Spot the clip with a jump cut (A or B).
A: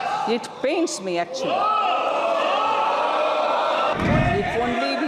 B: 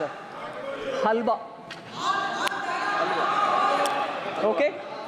A